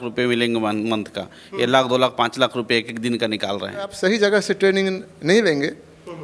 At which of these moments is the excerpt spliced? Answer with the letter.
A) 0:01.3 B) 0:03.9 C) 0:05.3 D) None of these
B